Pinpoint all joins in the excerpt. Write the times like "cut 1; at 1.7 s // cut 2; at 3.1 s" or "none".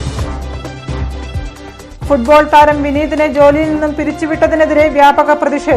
none